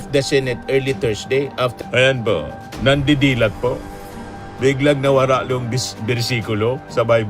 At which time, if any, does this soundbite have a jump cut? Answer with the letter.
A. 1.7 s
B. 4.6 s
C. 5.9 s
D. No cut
A